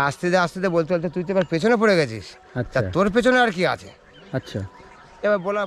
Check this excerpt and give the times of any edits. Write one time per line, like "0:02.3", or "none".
none